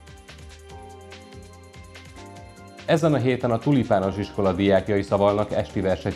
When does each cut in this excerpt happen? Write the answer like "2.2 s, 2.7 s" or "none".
none